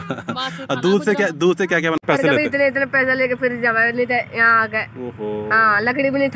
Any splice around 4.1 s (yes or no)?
no